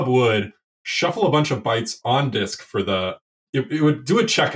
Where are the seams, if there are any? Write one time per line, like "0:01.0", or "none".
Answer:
0:03.3